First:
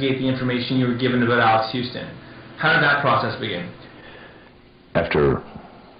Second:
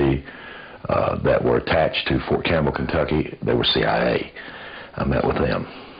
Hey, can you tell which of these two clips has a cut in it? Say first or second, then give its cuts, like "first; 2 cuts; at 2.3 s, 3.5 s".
first; 1 cut; at 3.2 s